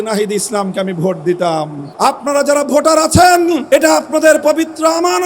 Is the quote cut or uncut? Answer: cut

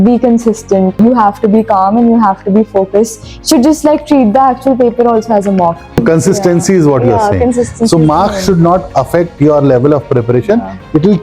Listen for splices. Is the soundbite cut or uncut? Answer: cut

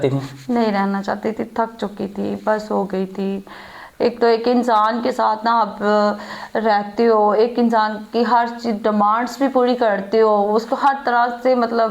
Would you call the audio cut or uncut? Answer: uncut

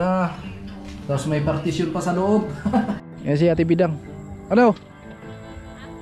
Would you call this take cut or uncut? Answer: cut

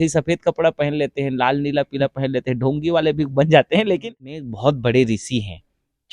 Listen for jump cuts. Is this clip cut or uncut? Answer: cut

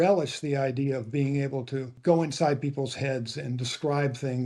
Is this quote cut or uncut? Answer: cut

